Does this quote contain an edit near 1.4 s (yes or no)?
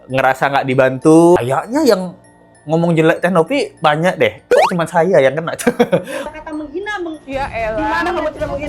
yes